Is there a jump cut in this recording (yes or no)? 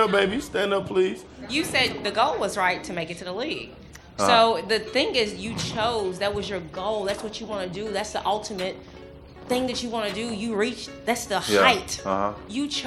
yes